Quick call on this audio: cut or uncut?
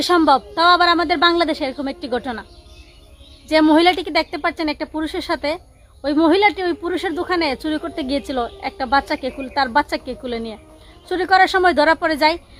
uncut